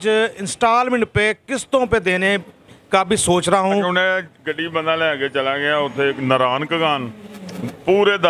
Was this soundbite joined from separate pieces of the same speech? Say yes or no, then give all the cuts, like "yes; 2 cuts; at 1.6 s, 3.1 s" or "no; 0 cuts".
yes; 1 cut; at 3.9 s